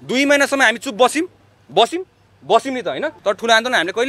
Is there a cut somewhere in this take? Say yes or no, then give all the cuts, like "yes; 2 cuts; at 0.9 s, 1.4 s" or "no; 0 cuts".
yes; 1 cut; at 3.1 s